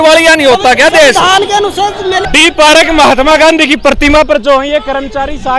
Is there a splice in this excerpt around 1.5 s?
no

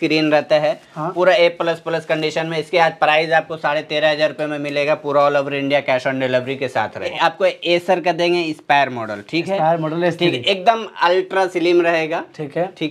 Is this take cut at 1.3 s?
no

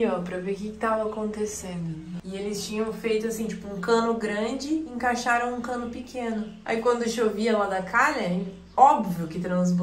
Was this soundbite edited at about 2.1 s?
yes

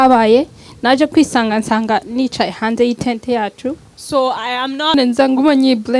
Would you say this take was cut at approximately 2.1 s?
no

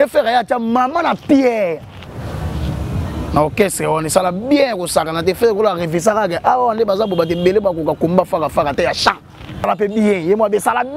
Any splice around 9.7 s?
yes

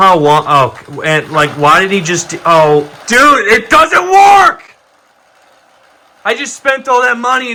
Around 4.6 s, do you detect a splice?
no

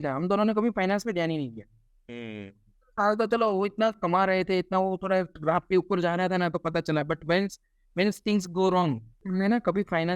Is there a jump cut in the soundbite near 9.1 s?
yes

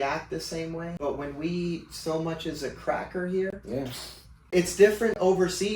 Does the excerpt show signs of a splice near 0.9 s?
yes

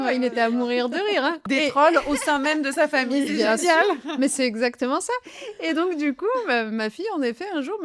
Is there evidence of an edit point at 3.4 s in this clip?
no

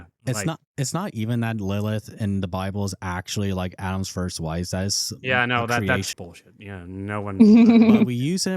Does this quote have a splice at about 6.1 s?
yes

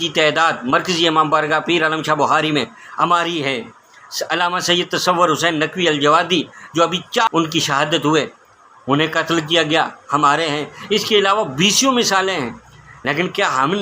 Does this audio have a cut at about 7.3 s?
yes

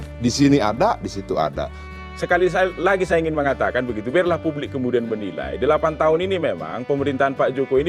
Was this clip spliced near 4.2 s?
no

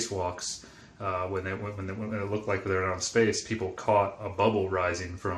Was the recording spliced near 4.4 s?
yes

